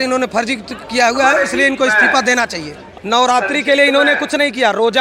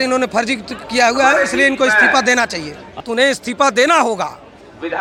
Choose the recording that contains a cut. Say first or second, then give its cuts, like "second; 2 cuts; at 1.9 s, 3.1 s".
first; 1 cut; at 2.9 s